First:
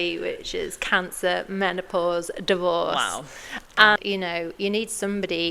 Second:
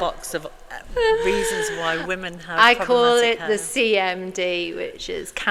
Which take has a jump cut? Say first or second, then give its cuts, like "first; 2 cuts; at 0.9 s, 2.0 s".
first; 1 cut; at 4.0 s